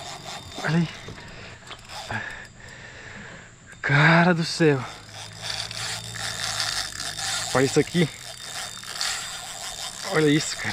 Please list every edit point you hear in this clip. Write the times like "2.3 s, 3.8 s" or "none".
1.6 s